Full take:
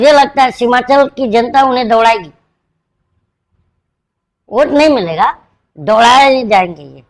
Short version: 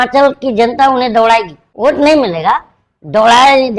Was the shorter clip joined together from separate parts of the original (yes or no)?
yes